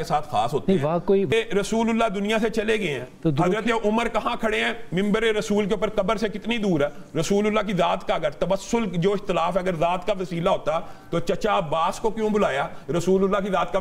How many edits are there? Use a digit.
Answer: 1